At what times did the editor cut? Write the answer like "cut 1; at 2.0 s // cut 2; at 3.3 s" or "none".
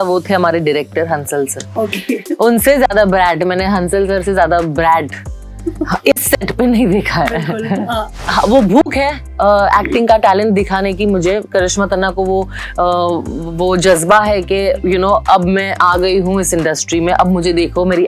cut 1; at 8.2 s